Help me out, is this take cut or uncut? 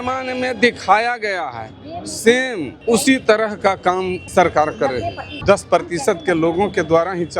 cut